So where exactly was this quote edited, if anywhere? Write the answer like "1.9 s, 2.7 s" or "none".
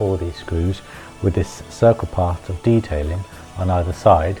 none